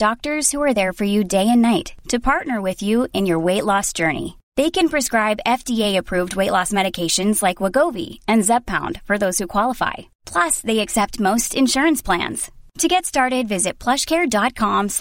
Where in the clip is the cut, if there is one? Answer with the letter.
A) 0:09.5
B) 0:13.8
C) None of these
C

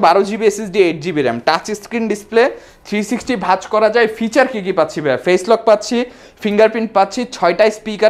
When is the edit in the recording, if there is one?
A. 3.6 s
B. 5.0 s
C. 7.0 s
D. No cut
D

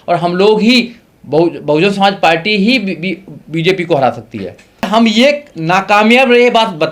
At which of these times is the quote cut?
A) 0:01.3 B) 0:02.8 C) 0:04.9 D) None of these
C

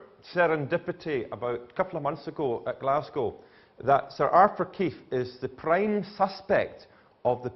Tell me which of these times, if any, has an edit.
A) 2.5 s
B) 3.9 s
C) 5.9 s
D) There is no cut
C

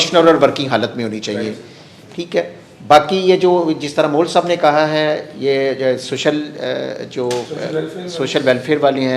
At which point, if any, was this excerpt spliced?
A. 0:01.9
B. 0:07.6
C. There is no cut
C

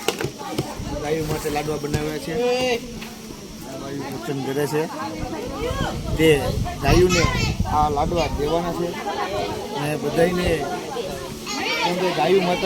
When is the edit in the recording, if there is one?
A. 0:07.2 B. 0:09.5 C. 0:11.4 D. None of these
D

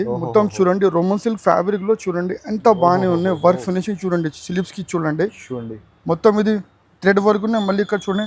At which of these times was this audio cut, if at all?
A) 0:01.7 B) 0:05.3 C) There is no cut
C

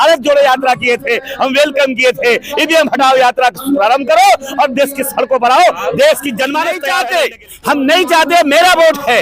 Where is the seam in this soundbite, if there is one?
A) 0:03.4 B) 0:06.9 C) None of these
B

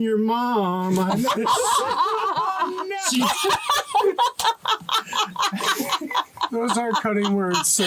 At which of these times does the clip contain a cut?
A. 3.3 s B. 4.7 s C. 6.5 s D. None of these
A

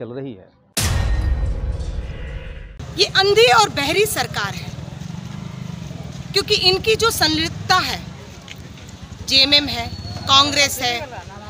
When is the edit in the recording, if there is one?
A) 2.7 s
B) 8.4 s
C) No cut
A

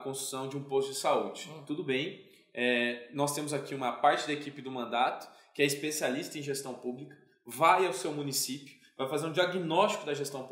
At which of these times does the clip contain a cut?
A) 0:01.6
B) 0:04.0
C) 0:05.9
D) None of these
A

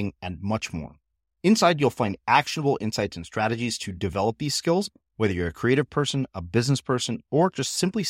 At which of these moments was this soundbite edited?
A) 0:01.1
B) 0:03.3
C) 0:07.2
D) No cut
D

